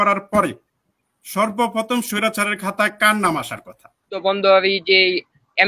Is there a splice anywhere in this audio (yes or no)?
yes